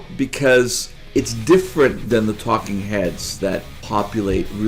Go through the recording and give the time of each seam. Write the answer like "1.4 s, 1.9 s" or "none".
1.0 s, 2.0 s, 3.8 s